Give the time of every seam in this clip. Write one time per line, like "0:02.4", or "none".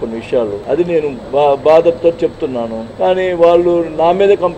0:01.0
0:02.8